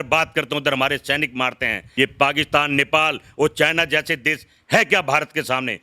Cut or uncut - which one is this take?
cut